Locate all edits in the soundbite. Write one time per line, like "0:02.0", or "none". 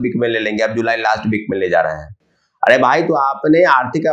none